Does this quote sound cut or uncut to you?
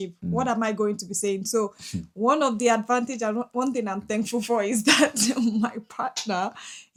uncut